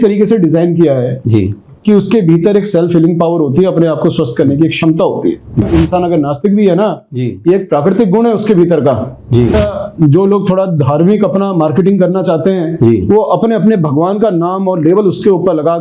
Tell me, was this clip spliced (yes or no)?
yes